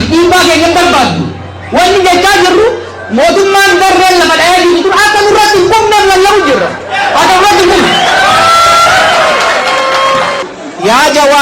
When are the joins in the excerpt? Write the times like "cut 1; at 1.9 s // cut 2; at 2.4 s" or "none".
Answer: cut 1; at 10.4 s

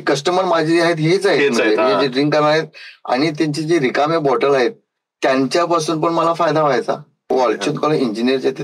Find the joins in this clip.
cut 1; at 7.3 s

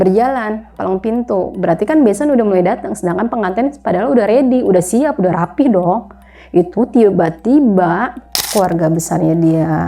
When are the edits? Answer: cut 1; at 8.4 s

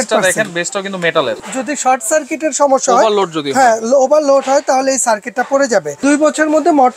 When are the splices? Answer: cut 1; at 1.4 s // cut 2; at 6.0 s

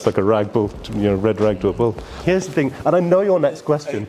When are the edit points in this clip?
cut 1; at 2.2 s

